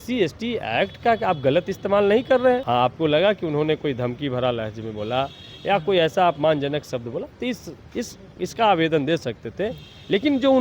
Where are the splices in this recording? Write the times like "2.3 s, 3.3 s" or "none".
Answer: 2.6 s